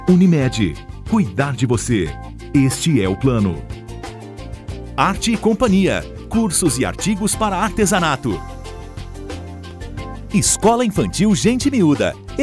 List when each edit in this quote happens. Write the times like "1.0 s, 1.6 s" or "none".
10.3 s